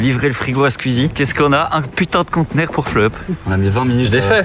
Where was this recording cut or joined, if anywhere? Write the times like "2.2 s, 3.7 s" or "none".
3.3 s